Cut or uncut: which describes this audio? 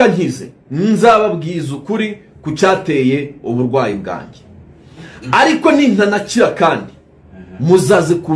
uncut